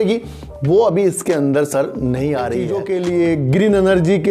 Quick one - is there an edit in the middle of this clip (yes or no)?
yes